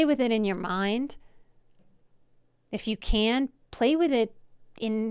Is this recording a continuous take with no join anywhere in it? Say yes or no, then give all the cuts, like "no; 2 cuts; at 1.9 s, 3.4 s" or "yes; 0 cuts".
yes; 0 cuts